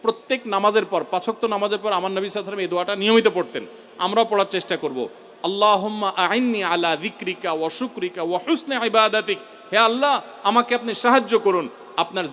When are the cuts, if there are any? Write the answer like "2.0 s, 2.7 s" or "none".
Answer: none